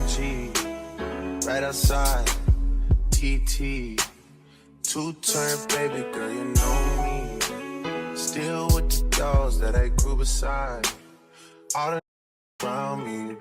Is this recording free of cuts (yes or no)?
yes